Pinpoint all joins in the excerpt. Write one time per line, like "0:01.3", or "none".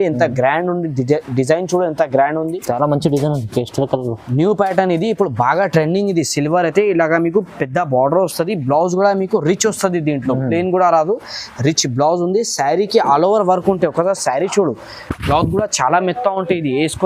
none